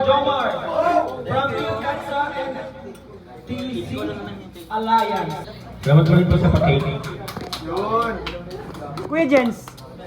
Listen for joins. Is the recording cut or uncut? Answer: cut